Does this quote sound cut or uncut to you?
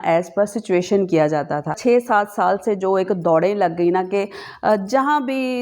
cut